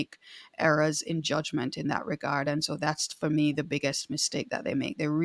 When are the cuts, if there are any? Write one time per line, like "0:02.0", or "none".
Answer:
none